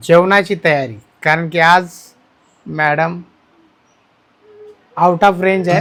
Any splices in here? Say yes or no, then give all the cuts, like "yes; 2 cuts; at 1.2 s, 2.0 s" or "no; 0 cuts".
no; 0 cuts